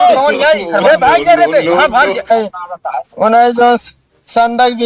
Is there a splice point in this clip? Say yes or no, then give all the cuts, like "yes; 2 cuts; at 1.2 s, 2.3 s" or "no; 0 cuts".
yes; 1 cut; at 2.3 s